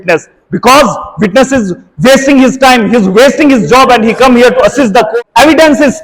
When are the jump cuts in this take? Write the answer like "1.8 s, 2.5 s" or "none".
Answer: 5.1 s